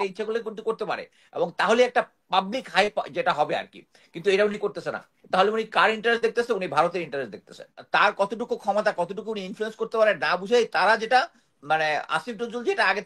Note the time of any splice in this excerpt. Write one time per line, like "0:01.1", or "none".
0:07.7